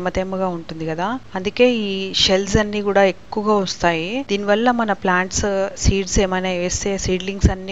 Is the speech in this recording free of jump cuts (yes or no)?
yes